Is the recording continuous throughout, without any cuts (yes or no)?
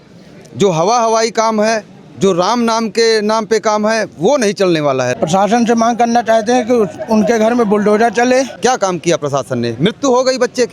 no